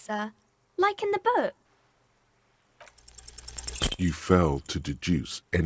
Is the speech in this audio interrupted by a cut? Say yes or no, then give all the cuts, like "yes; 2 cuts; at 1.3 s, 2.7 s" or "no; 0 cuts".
yes; 1 cut; at 1.6 s